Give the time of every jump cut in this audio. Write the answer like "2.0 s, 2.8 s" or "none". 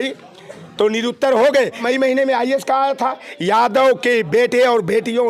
1.8 s